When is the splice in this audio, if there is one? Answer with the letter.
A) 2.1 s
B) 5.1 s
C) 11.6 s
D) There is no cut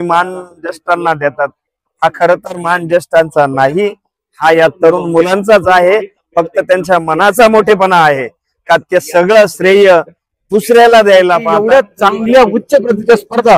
C